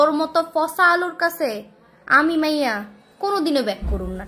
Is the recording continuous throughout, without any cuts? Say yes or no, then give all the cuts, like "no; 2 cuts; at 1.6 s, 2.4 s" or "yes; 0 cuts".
yes; 0 cuts